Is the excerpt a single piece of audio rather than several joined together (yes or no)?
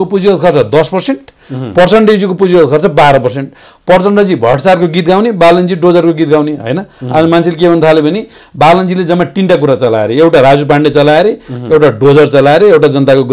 yes